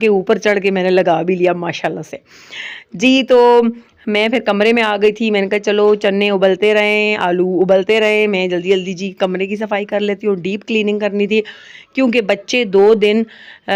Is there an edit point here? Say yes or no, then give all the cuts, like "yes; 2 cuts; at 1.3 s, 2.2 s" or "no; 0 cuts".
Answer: no; 0 cuts